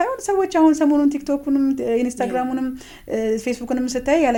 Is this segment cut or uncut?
uncut